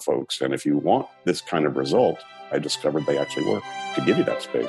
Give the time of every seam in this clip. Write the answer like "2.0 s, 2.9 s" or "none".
1.1 s, 2.3 s, 3.9 s